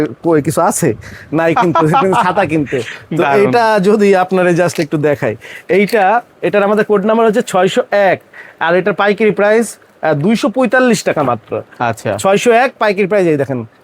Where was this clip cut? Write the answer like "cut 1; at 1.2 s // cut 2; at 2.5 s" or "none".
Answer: none